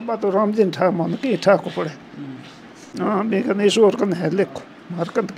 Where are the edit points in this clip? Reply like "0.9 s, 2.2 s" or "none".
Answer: 2.8 s